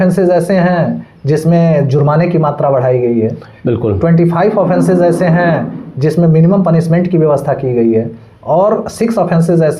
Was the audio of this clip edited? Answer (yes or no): no